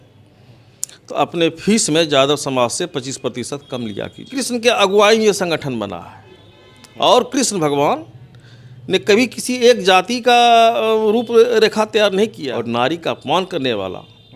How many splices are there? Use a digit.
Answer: 2